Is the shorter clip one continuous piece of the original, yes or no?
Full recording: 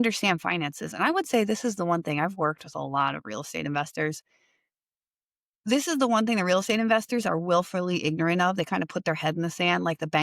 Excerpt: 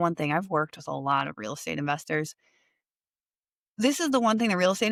yes